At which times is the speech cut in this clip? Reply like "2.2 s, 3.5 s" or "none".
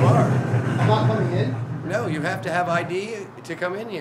none